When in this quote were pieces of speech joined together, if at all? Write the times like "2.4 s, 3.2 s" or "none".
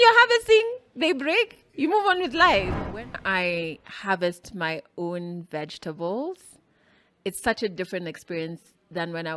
3.1 s